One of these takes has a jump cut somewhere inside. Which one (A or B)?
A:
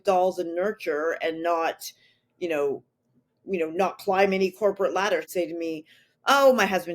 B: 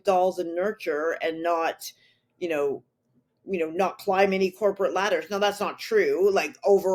A